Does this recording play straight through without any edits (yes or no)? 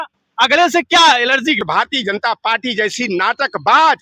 no